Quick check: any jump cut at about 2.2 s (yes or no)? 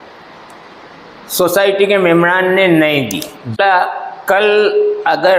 no